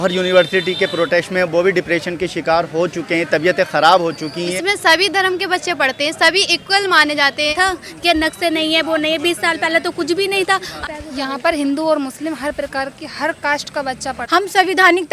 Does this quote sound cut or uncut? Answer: cut